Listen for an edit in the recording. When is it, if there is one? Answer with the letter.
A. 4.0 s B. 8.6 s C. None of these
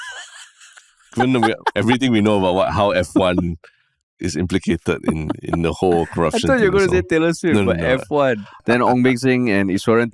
B